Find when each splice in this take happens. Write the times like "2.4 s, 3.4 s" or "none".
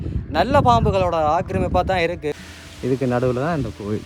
2.4 s